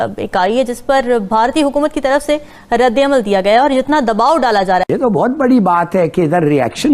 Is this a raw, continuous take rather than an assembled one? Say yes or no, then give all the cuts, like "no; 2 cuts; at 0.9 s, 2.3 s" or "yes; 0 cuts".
no; 1 cut; at 4.8 s